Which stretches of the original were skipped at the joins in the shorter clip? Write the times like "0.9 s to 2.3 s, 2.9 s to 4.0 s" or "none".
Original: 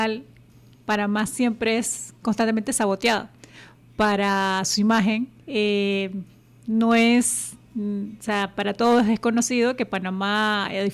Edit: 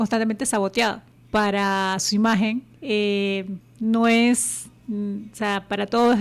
3.4 s to 3.8 s, 6.3 s to 6.5 s